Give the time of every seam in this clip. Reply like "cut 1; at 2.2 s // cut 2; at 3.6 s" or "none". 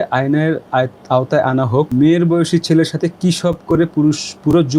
cut 1; at 1.9 s